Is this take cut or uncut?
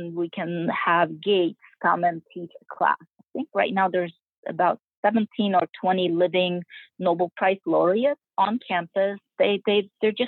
cut